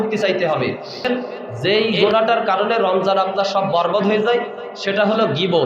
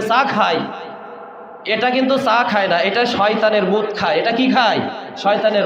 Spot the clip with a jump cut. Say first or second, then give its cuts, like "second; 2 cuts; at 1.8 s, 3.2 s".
first; 1 cut; at 1.1 s